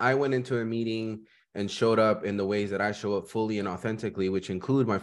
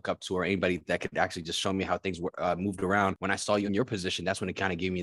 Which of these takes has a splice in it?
second; 1 cut; at 3.5 s

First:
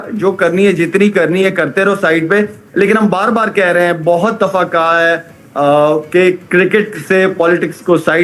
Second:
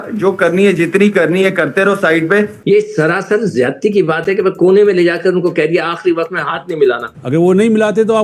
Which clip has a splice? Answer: second; 2 cuts; at 2.6 s, 7.1 s

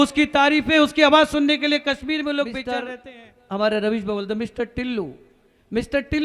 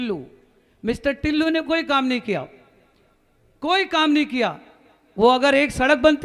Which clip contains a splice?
first; 1 cut; at 2.9 s

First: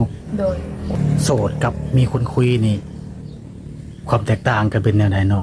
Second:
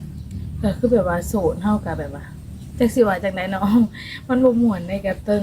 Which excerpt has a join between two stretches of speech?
first; 1 cut; at 0.9 s

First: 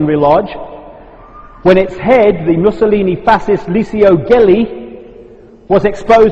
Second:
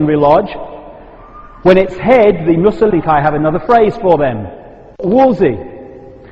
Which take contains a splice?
first; 1 cut; at 2.9 s

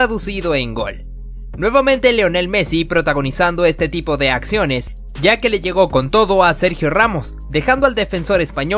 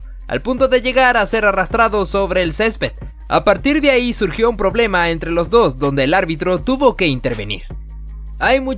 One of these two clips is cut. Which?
first; 1 cut; at 4.9 s

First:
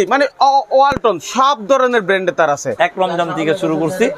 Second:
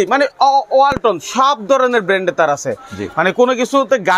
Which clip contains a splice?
first; 1 cut; at 2.7 s

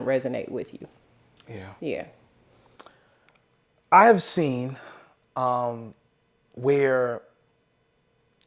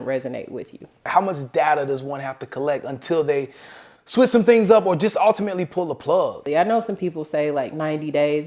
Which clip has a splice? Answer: second; 2 cuts; at 1.1 s, 6.4 s

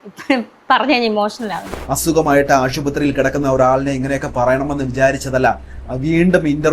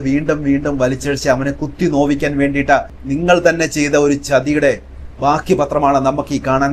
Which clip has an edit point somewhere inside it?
first; 1 cut; at 1.6 s

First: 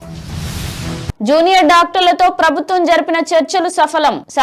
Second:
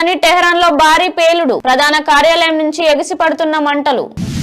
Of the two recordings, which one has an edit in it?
first; 1 cut; at 0.9 s

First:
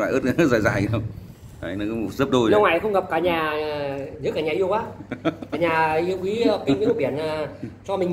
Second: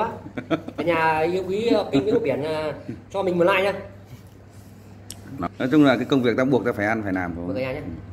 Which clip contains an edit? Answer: second; 1 cut; at 5.4 s

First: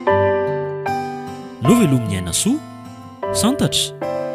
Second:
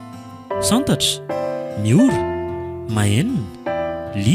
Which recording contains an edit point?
first; 1 cut; at 1.5 s

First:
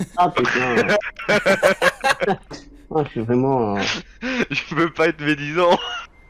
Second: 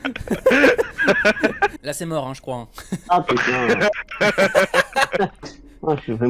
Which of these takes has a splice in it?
second; 1 cut; at 1.8 s

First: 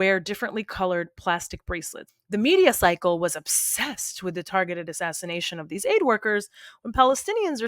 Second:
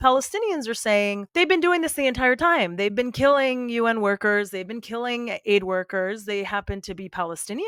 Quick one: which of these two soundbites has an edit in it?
first; 1 cut; at 1.9 s

